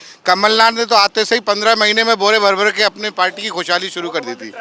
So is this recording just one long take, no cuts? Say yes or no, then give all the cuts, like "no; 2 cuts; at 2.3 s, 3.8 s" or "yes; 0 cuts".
yes; 0 cuts